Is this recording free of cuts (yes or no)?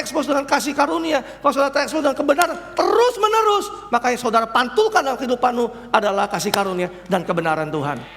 yes